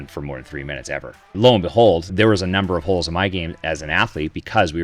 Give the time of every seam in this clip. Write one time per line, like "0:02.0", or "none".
0:01.3
0:02.1